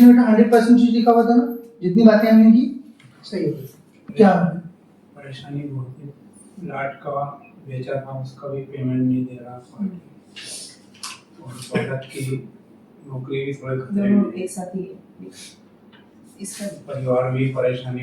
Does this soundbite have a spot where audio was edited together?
yes; 1 cut; at 4.1 s

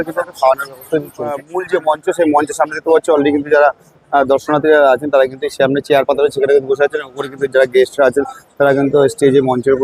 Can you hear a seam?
no; 0 cuts

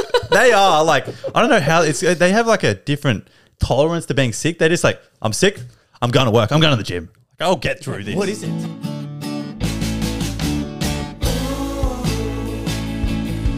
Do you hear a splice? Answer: yes; 1 cut; at 8.4 s

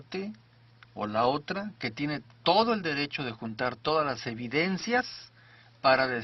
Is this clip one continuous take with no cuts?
no; 1 cut; at 3.0 s

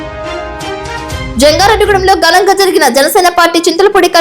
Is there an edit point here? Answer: yes; 1 cut; at 1.0 s

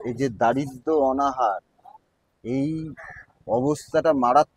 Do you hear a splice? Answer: no; 0 cuts

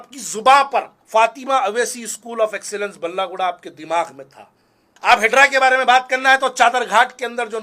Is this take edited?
yes; 2 cuts; at 0.9 s, 4.6 s

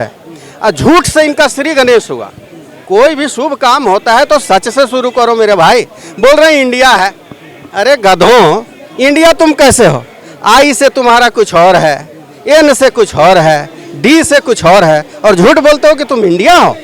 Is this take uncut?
yes; 0 cuts

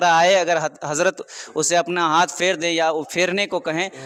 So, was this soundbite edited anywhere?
no; 0 cuts

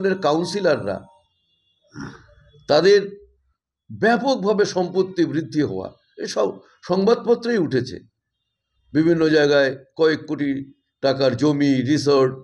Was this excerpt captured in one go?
yes; 0 cuts

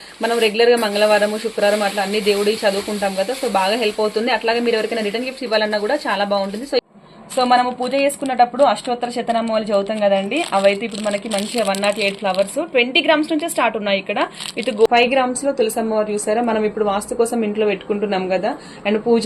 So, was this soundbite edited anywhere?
yes; 2 cuts; at 6.8 s, 14.9 s

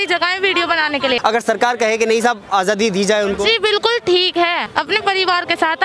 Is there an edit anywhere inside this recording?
yes; 2 cuts; at 1.2 s, 4.6 s

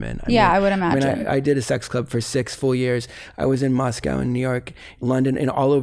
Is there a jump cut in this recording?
no; 0 cuts

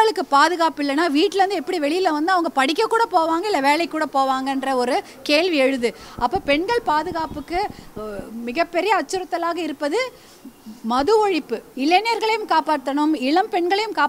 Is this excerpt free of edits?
no; 1 cut; at 11.7 s

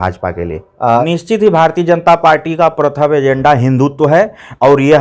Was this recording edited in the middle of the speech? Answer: yes; 1 cut; at 1.1 s

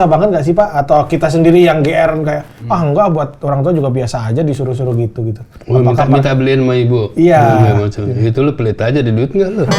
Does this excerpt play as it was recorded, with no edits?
yes; 0 cuts

